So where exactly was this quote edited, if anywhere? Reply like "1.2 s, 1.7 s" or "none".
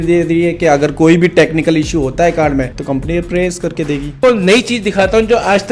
2.8 s, 4.2 s